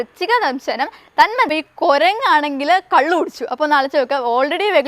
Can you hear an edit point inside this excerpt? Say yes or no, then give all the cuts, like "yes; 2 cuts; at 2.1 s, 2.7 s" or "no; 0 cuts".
yes; 1 cut; at 1.5 s